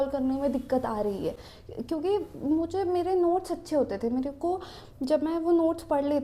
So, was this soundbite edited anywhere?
no; 0 cuts

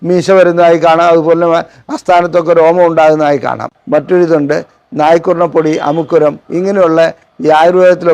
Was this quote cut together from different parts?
yes; 1 cut; at 3.7 s

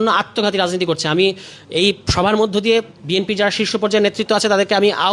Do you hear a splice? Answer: no; 0 cuts

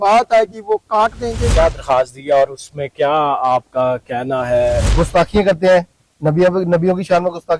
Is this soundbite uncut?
no; 2 cuts; at 1.4 s, 4.9 s

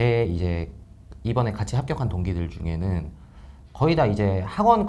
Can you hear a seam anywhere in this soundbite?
no; 0 cuts

